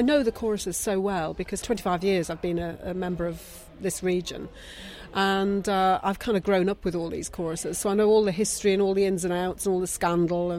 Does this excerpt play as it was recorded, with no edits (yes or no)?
no